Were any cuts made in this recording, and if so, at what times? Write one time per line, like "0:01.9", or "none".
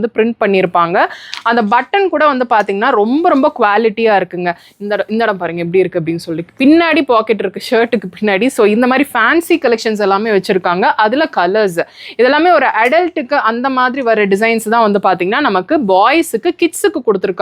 none

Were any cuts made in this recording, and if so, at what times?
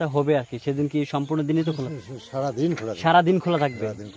none

